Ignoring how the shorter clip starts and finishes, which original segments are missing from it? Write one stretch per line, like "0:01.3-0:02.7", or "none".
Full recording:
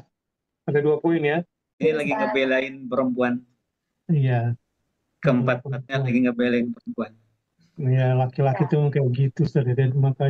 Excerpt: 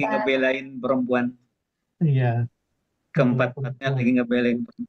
none